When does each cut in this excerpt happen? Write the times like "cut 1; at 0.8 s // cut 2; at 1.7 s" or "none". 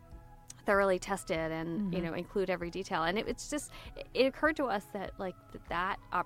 none